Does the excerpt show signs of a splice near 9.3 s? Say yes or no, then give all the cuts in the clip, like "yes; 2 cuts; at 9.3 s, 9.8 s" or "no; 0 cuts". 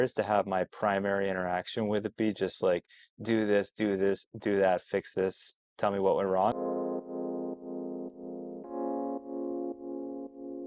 no; 1 cut; at 6.5 s